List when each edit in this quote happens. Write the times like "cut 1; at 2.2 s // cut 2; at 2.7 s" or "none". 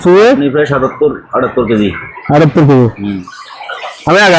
none